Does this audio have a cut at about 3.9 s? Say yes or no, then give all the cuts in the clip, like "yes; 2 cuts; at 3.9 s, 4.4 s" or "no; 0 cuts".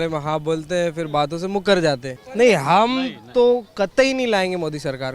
no; 1 cut; at 2.2 s